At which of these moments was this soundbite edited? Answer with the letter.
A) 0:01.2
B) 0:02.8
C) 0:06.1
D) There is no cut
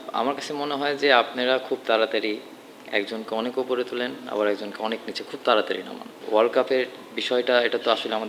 C